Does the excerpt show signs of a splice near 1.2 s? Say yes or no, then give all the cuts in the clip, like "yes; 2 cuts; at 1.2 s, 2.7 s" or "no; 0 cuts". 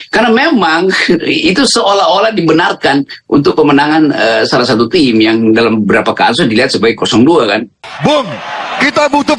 no; 1 cut; at 7.8 s